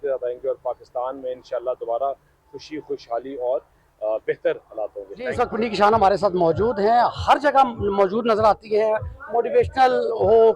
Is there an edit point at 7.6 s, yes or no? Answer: no